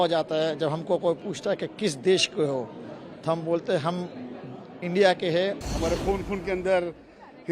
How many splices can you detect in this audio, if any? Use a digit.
1